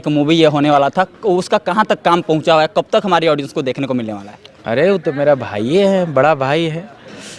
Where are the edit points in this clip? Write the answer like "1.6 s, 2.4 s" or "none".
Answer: none

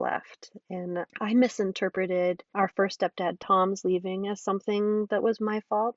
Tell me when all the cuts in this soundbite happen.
1.1 s, 2.5 s

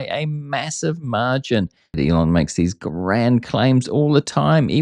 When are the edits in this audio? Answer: 2.0 s

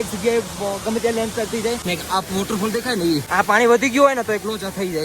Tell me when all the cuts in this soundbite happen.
1.8 s, 3.3 s

